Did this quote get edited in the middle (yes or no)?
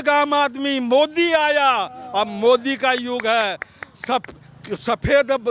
no